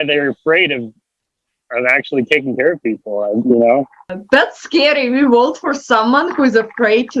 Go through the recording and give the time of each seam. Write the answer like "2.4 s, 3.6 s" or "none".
3.4 s, 4.1 s